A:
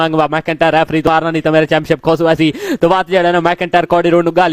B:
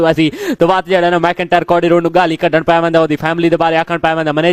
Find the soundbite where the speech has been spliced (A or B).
A